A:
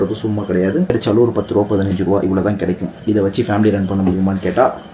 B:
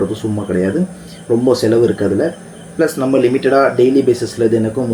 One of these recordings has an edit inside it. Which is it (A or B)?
A